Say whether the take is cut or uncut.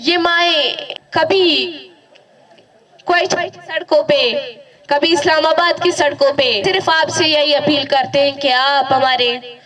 cut